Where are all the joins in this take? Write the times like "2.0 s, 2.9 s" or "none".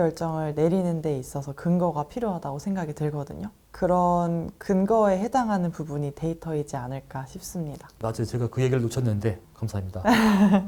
none